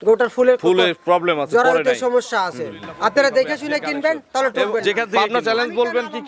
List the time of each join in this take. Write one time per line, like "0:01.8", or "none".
0:05.1